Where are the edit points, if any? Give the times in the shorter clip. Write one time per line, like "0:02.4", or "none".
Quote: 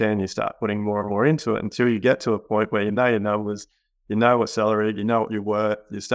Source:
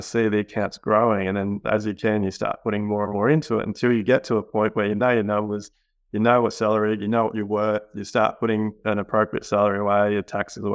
none